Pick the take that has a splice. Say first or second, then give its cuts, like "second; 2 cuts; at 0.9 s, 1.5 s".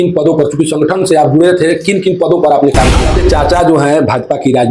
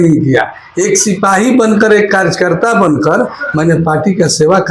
first; 1 cut; at 3.0 s